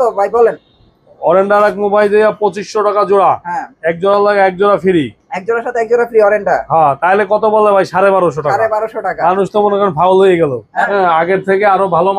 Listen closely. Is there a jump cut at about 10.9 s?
yes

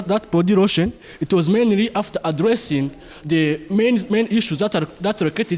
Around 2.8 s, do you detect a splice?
no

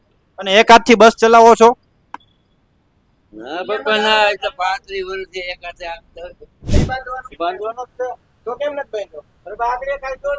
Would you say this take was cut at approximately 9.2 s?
no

